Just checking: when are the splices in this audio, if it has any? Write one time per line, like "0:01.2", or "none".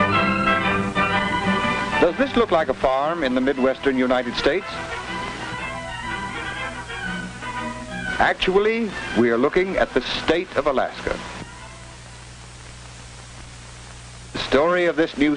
0:01.8

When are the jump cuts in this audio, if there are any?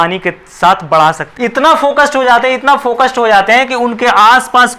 0:01.3

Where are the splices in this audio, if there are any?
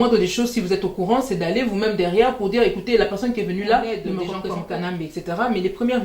0:04.2

